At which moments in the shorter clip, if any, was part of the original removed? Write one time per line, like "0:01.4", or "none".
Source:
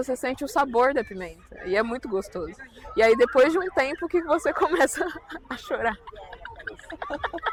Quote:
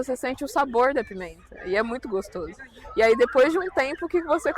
none